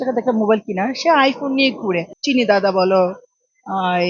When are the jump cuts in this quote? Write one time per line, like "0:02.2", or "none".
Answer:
0:02.1

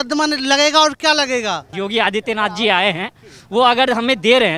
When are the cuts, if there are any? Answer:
0:01.7

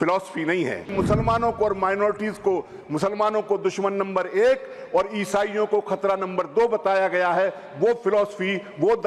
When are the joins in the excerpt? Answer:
0:00.9

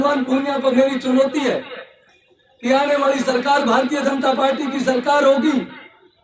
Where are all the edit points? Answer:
none

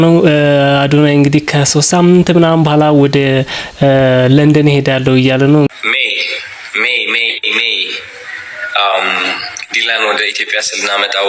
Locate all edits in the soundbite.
0:05.7

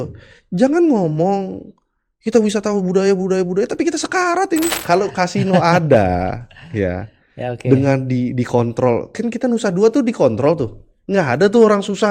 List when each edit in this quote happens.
0:04.8

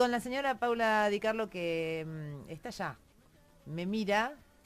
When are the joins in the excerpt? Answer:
0:02.7

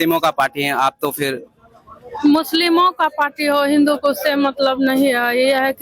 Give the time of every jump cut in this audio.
none

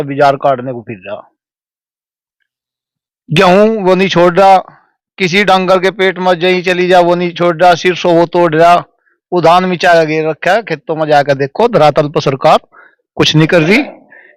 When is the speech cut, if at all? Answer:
none

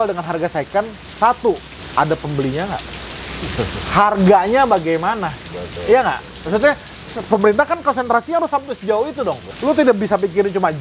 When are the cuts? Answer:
0:01.7
0:09.5

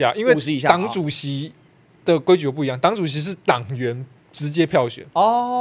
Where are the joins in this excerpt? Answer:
none

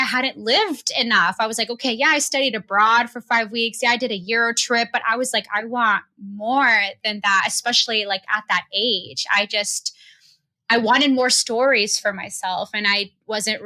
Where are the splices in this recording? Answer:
none

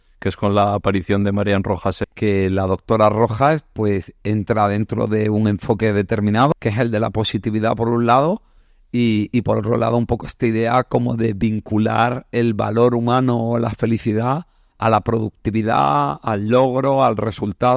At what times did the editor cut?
0:02.0
0:06.5

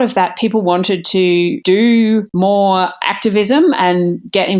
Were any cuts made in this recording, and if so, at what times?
0:01.6
0:02.3

